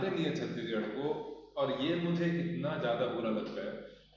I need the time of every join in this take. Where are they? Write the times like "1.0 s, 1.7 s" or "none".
none